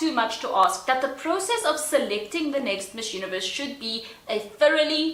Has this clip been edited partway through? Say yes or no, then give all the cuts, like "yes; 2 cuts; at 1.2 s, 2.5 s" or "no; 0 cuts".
no; 0 cuts